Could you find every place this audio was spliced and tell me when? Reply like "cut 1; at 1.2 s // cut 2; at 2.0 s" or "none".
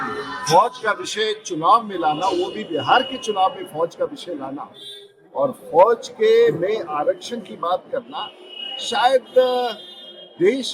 none